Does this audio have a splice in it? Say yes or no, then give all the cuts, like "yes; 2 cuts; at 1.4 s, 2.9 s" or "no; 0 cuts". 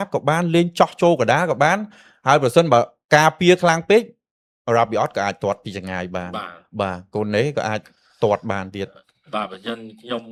no; 0 cuts